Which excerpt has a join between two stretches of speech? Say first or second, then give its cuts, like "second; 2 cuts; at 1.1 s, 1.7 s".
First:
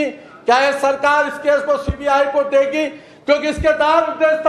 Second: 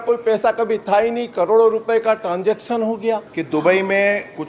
second; 1 cut; at 3.3 s